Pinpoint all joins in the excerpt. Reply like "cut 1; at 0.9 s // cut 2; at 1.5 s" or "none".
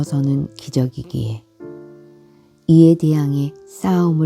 cut 1; at 1.4 s // cut 2; at 2.5 s